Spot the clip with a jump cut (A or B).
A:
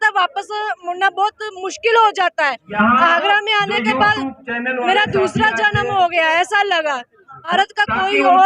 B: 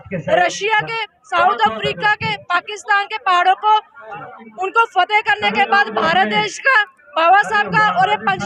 A